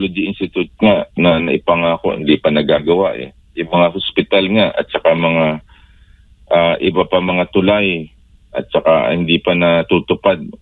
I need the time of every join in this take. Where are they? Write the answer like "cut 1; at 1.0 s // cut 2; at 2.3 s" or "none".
none